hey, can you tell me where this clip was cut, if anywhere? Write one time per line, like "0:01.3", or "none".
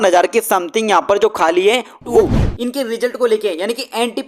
0:02.2